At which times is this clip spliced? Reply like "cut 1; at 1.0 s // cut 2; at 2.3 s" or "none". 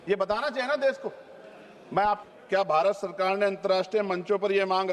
cut 1; at 2.2 s